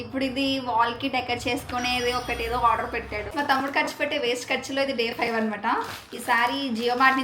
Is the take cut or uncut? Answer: cut